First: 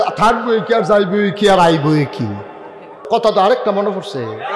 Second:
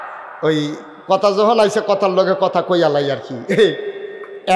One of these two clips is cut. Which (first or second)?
first